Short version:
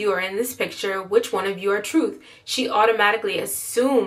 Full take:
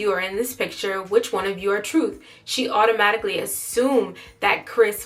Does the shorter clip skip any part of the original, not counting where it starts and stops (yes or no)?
no